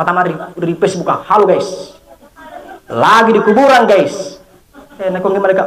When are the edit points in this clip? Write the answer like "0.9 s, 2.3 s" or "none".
none

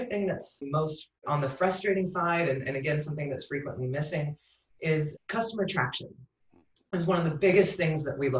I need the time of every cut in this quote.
1.0 s, 5.1 s

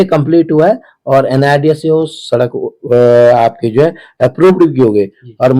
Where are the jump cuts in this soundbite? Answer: none

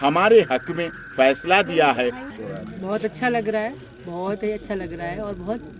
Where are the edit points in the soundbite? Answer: 2.2 s

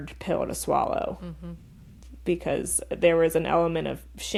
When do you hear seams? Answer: none

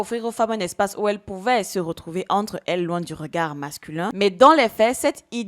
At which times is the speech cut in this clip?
4.1 s

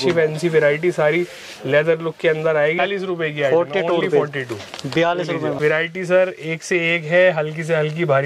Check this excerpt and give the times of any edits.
2.8 s, 5.6 s

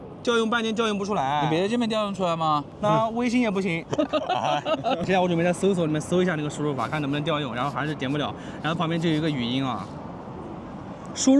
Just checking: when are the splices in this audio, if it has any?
2.7 s, 5.0 s

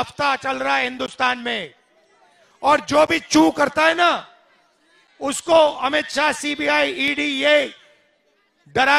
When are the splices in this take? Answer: none

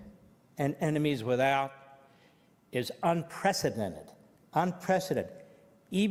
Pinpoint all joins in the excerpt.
none

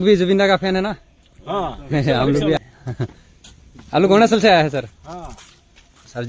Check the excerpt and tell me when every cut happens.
2.6 s

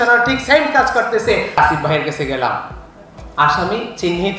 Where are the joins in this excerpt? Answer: 1.6 s

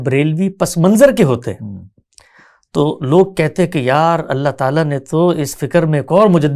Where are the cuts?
none

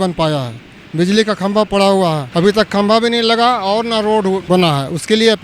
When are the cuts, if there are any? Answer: 2.2 s, 4.4 s

